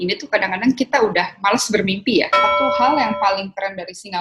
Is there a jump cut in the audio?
yes; 1 cut; at 2.5 s

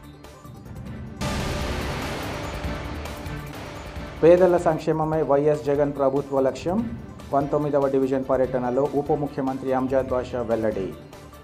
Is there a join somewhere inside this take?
yes; 1 cut; at 1.0 s

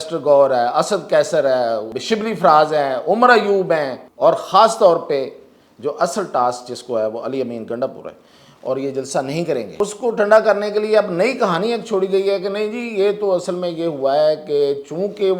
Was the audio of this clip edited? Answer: yes; 3 cuts; at 1.9 s, 4.0 s, 9.8 s

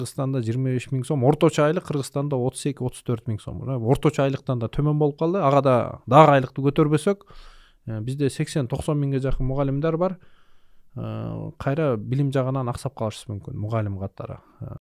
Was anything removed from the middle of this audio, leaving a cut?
no; 0 cuts

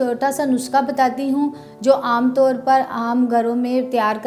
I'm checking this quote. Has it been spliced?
no; 0 cuts

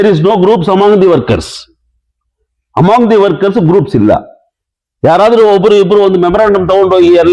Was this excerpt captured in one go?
yes; 0 cuts

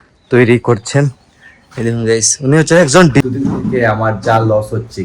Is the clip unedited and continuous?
no; 1 cut; at 3.2 s

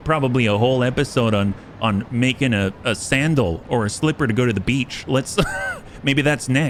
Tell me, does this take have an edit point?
no; 0 cuts

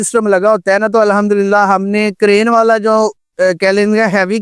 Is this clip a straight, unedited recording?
yes; 0 cuts

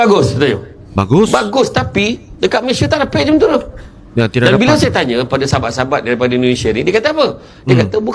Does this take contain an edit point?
no; 0 cuts

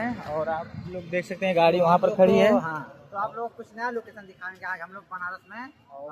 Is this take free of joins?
yes; 0 cuts

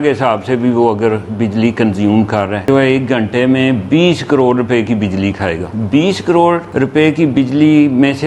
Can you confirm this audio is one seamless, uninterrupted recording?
no; 3 cuts; at 2.7 s, 5.7 s, 6.7 s

